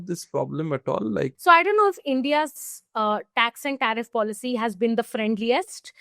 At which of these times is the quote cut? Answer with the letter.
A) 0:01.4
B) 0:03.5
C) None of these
A